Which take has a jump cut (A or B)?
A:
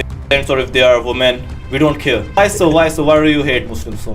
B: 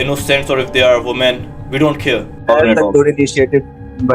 A